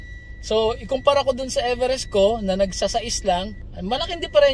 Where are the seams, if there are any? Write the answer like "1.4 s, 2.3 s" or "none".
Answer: 3.6 s